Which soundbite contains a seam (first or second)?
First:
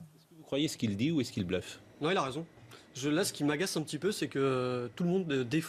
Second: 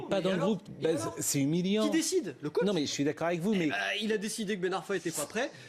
second